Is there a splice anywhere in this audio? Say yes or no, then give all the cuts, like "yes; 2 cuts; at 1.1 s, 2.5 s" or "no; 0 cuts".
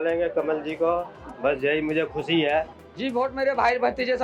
yes; 1 cut; at 2.8 s